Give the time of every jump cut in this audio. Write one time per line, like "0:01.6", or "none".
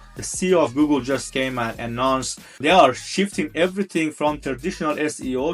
0:01.3
0:02.6
0:04.4